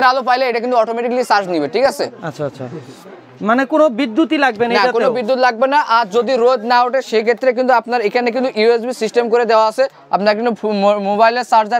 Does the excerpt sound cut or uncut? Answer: uncut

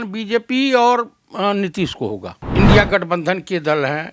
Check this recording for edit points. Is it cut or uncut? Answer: cut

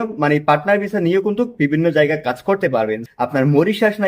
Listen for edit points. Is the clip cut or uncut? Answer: cut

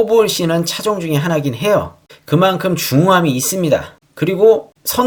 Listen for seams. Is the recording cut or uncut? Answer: uncut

